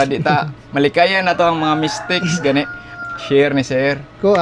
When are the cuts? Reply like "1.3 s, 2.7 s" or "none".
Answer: none